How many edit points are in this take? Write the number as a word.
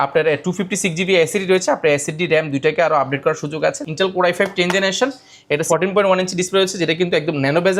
two